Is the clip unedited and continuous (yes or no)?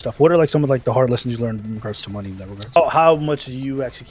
no